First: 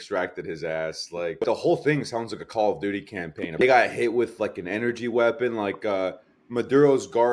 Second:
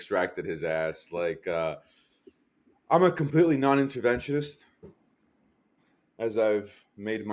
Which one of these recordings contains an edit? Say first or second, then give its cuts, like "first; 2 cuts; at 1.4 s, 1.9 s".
first; 2 cuts; at 1.4 s, 3.6 s